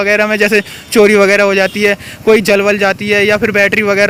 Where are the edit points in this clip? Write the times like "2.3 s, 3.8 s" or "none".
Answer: none